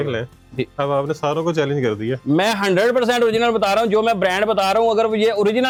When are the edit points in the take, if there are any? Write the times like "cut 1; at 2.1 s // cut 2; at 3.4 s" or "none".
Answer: none